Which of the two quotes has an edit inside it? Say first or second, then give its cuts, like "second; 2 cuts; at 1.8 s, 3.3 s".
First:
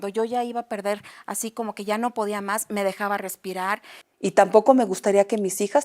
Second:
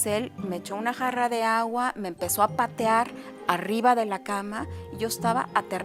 first; 1 cut; at 4.0 s